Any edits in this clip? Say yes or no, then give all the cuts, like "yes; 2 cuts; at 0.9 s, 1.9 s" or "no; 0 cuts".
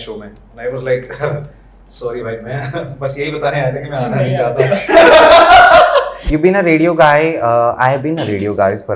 yes; 1 cut; at 6.2 s